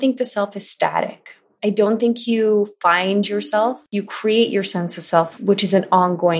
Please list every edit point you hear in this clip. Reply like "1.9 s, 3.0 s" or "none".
3.8 s, 5.3 s